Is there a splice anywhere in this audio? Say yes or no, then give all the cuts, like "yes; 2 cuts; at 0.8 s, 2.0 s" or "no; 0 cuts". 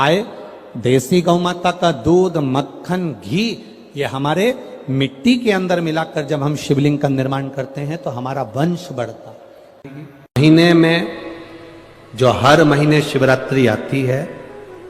yes; 1 cut; at 9.8 s